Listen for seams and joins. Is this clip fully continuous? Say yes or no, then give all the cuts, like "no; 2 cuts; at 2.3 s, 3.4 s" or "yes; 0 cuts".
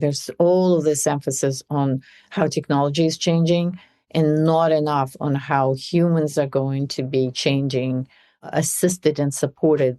yes; 0 cuts